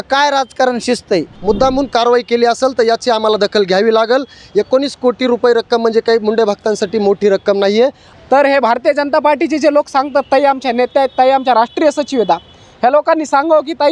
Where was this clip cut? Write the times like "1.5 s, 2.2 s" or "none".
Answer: 1.3 s, 8.1 s

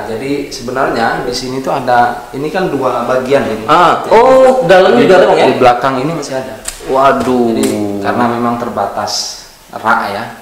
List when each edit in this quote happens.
none

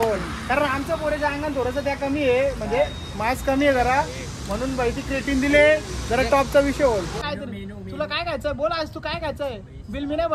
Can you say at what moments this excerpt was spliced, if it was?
7.2 s

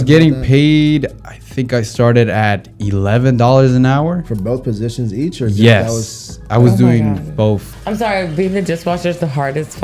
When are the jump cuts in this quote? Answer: 7.7 s

